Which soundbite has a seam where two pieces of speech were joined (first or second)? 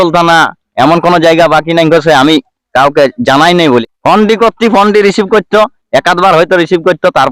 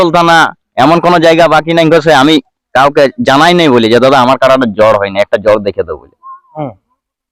first